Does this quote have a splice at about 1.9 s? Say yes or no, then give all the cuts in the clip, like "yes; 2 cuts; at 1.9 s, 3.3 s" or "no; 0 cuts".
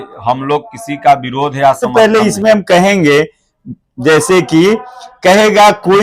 yes; 1 cut; at 1.9 s